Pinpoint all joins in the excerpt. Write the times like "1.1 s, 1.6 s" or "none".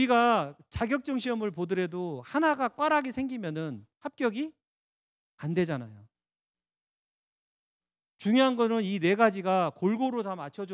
none